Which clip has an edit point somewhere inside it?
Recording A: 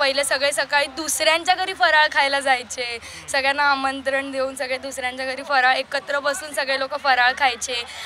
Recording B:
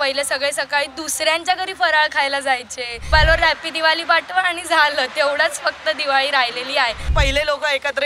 B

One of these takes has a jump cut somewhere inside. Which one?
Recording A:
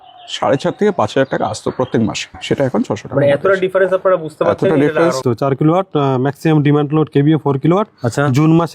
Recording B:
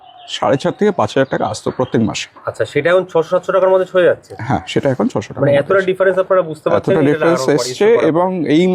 A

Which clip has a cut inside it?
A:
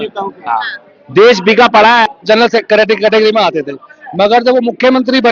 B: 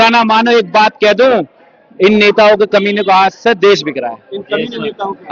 A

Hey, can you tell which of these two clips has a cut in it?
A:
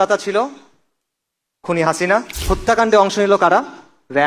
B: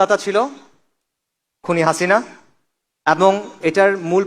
A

